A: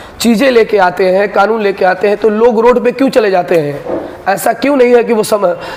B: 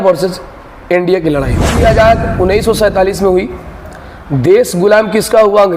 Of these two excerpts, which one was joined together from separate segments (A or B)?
B